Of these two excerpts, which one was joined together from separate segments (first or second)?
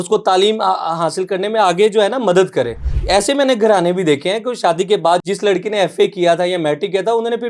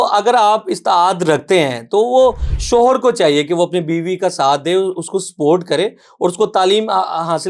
first